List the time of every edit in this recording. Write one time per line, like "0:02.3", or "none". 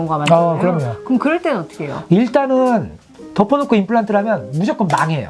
0:02.0

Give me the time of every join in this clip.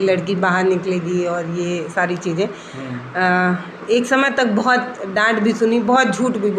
none

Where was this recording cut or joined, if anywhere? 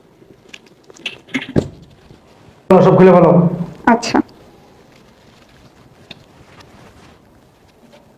0:02.7

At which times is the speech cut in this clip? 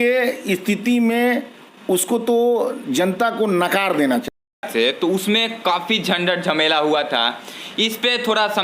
0:04.6

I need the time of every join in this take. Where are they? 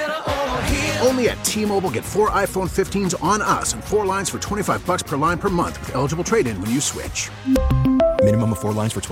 none

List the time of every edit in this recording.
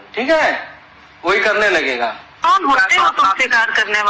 0:02.4

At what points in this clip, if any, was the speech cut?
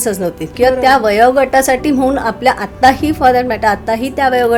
none

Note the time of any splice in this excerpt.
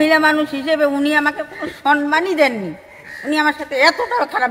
none

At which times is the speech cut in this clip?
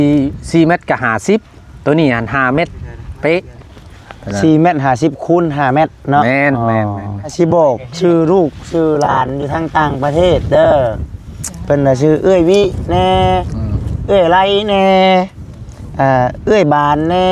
0:07.3

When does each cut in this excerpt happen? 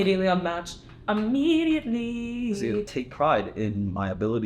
0:02.9

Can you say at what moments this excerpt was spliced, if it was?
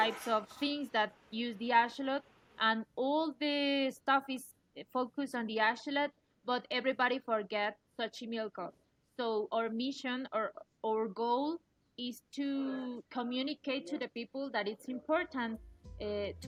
none

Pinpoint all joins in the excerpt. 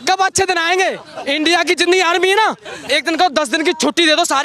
0:01.1

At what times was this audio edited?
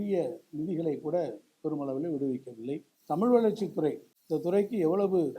0:02.9
0:04.1

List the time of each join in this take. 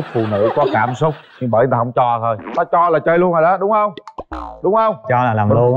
none

